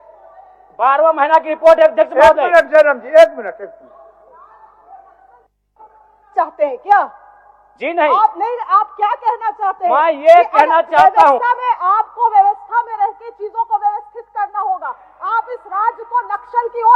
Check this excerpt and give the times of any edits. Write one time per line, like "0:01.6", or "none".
none